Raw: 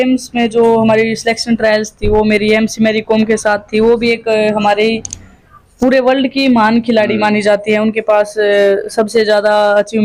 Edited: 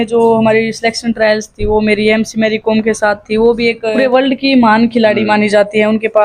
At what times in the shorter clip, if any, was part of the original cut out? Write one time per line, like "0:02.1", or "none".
0:04.0